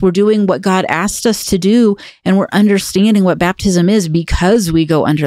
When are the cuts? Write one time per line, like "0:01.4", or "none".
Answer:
none